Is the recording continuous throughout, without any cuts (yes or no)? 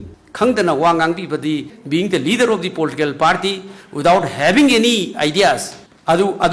no